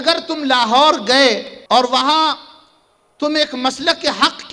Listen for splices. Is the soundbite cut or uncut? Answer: cut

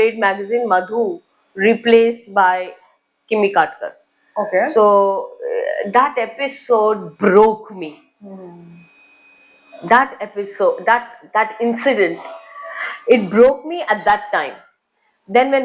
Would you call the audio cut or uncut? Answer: uncut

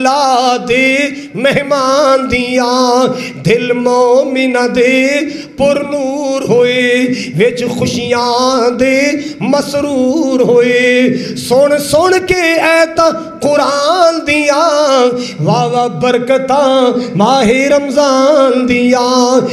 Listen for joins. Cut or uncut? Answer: uncut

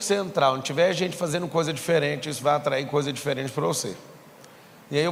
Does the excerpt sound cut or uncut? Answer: uncut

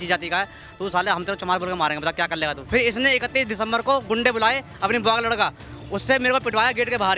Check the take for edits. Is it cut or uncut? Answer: cut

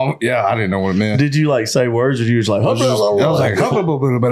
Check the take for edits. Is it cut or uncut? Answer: uncut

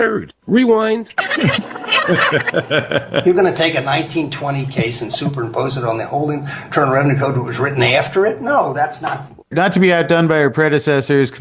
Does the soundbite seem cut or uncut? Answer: cut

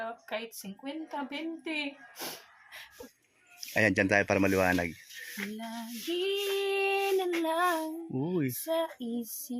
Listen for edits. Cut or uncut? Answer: cut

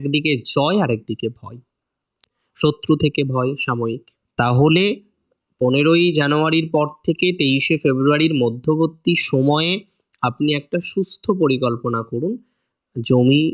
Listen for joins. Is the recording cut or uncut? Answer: cut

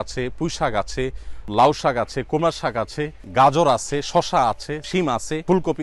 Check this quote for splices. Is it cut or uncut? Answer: cut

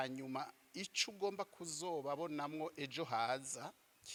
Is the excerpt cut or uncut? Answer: uncut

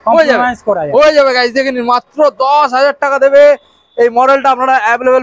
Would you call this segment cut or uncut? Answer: uncut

